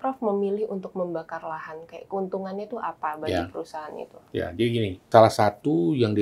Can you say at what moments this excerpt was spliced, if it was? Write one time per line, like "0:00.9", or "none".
0:05.1